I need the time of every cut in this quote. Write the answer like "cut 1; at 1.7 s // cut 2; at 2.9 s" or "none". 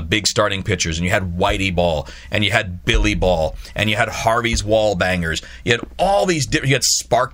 none